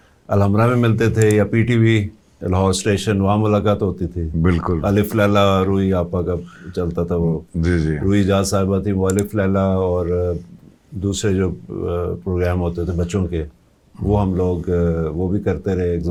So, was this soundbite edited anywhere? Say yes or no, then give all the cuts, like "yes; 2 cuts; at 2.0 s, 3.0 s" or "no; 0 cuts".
no; 0 cuts